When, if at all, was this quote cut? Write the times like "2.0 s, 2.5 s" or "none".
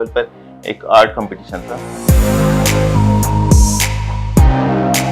2.0 s